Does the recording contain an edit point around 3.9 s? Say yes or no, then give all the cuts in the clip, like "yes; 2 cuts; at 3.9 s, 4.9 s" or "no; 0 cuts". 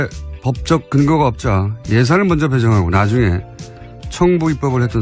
no; 0 cuts